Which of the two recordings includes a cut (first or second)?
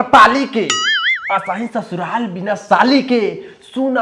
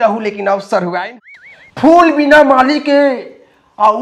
second